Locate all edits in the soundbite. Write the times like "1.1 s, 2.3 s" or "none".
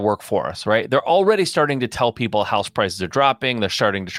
none